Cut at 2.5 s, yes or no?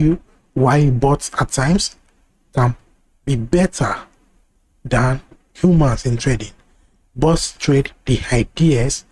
no